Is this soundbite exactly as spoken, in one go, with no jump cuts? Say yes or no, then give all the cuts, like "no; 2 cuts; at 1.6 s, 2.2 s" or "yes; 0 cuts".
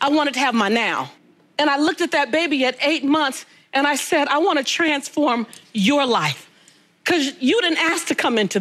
yes; 0 cuts